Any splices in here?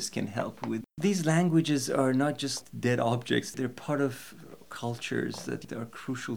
yes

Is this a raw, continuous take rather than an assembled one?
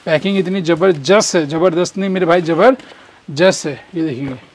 yes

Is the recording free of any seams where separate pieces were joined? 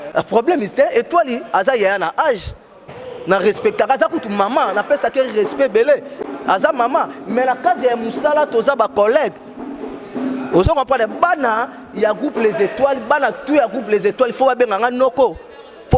yes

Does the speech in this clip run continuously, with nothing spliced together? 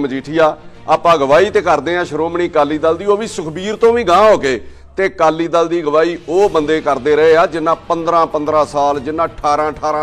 yes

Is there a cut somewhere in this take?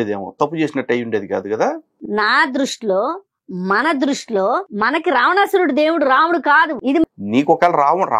yes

